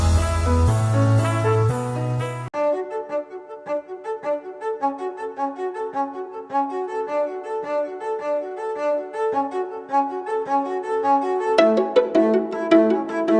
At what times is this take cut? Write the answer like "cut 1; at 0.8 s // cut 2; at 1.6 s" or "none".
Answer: none

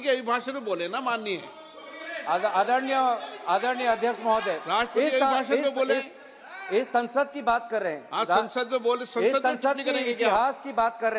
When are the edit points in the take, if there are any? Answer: none

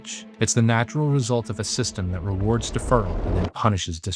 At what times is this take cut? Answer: cut 1; at 3.2 s

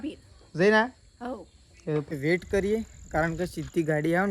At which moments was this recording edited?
cut 1; at 2.1 s

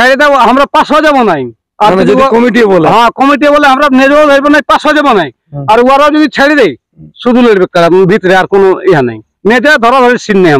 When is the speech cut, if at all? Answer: none

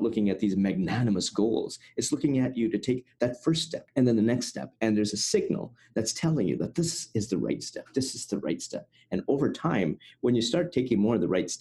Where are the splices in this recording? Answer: cut 1; at 3.8 s

